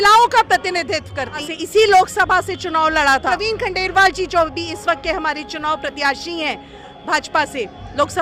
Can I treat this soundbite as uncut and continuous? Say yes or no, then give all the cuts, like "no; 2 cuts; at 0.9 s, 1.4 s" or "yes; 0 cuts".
no; 2 cuts; at 1.4 s, 3.3 s